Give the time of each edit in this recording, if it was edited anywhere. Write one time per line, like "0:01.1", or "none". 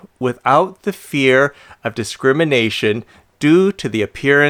none